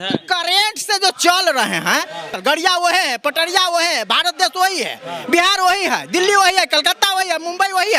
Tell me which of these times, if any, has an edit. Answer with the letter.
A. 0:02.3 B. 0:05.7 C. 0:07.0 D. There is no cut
A